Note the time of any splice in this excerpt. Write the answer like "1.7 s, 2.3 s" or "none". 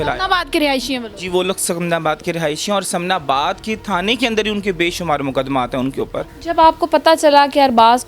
6.3 s